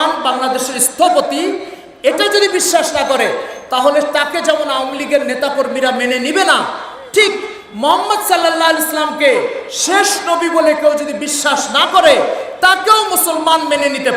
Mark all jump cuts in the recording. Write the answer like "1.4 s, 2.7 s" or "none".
none